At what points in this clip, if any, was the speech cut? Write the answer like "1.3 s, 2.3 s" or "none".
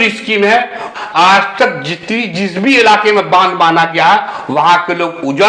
0.9 s